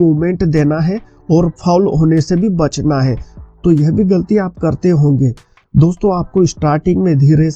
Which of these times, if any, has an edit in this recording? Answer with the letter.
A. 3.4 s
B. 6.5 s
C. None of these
A